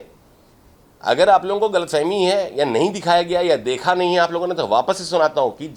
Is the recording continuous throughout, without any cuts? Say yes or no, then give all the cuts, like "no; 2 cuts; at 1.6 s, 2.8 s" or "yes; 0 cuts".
yes; 0 cuts